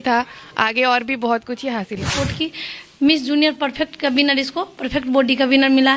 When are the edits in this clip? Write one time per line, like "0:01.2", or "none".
0:02.1